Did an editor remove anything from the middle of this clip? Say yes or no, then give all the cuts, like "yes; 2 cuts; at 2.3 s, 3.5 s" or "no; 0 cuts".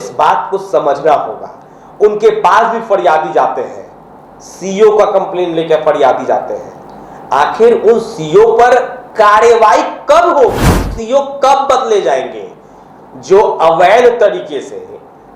yes; 1 cut; at 11.0 s